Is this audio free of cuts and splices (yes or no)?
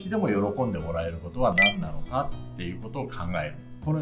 yes